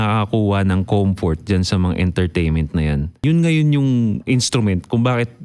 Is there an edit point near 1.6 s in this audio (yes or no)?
no